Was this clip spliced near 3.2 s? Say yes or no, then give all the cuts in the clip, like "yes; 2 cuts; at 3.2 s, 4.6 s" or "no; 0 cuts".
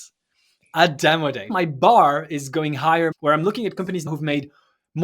yes; 3 cuts; at 1.5 s, 3.2 s, 4.1 s